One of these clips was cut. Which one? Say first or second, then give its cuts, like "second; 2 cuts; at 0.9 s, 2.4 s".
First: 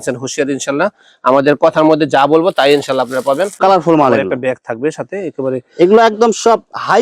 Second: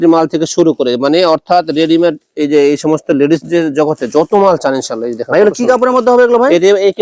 first; 1 cut; at 3.5 s